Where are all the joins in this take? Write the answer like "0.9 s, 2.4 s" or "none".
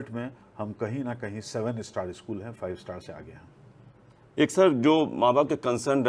none